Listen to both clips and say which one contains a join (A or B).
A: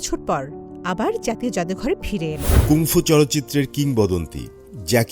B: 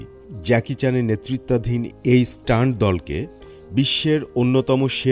A